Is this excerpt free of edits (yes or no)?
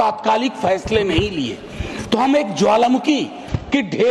yes